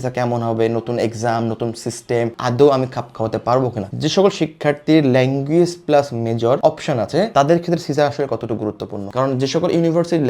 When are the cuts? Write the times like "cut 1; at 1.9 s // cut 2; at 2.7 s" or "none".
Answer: cut 1; at 3.9 s // cut 2; at 9.1 s